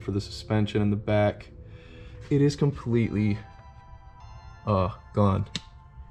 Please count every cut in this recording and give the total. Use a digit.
0